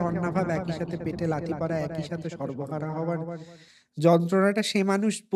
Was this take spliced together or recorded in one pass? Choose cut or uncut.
uncut